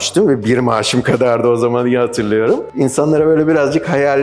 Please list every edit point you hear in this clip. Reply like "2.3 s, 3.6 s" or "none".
2.7 s